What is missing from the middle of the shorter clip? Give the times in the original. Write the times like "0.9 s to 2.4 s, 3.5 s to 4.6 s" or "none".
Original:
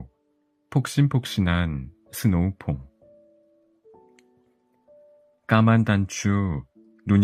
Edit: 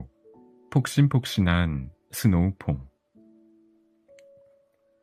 none